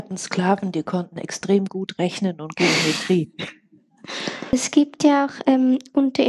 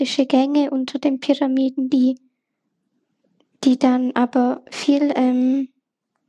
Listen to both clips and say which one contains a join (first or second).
first